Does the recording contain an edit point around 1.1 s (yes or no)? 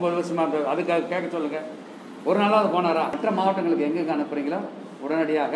no